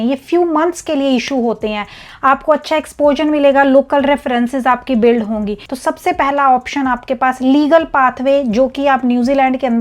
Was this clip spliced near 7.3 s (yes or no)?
no